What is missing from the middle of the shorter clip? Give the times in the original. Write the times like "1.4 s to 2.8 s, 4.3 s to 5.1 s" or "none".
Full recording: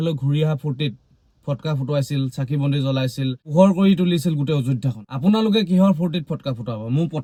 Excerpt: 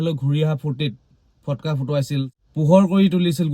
2.5 s to 3.3 s